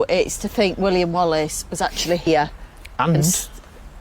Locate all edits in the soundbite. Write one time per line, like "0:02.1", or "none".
0:02.3